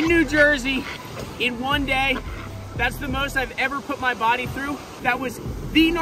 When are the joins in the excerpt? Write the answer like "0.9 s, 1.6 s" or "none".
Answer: 4.9 s